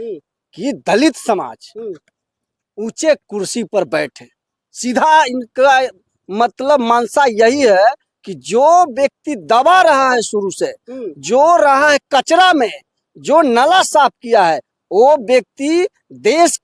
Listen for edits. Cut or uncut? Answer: uncut